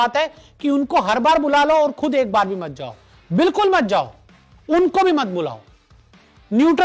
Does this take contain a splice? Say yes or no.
no